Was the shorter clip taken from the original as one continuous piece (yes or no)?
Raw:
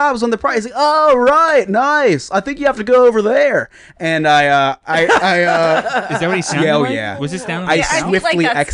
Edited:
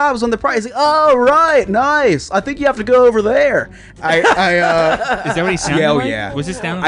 no